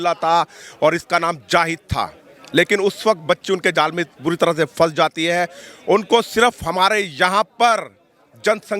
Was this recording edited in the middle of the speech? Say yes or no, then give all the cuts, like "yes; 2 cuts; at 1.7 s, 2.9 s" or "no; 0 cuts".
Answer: no; 0 cuts